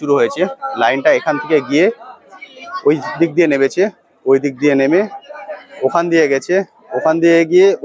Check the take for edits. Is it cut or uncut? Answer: uncut